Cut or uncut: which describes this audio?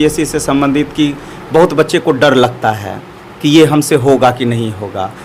uncut